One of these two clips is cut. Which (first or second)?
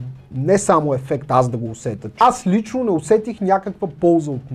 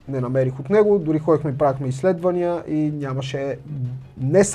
first